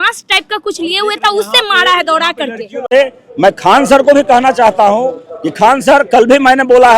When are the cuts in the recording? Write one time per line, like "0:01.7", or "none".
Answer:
0:02.9